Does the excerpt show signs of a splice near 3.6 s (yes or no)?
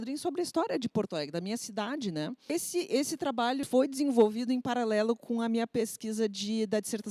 yes